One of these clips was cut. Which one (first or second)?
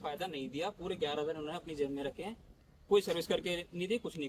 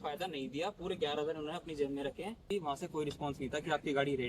second